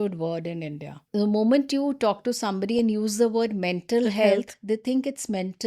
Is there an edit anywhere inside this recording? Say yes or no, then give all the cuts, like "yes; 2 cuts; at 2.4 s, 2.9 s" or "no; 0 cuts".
yes; 1 cut; at 1.0 s